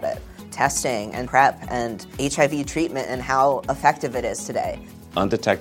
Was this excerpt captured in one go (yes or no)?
yes